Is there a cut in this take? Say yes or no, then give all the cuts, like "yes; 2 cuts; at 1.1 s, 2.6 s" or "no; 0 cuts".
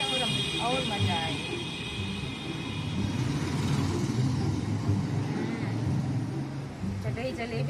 no; 0 cuts